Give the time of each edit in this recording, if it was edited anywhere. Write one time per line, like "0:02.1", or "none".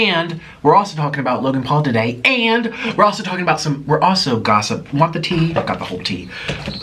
none